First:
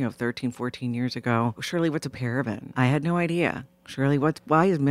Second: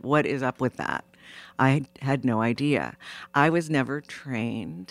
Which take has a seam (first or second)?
first